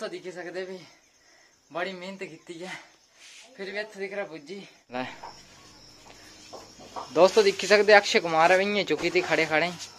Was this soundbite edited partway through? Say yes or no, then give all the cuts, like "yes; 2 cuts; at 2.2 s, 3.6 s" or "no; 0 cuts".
yes; 1 cut; at 4.9 s